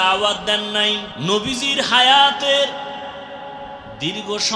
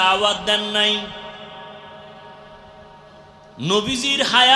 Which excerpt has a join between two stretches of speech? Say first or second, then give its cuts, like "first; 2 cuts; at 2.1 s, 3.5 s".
first; 1 cut; at 1.1 s